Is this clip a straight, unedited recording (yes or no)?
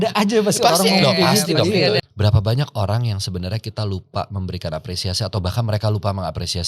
no